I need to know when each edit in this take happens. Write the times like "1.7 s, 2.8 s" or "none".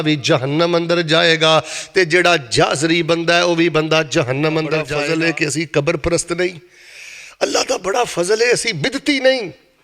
5.0 s